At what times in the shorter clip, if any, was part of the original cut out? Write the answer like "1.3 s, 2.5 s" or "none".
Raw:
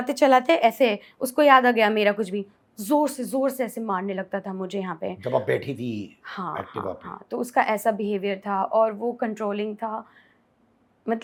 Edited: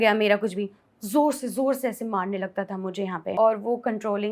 3.3 s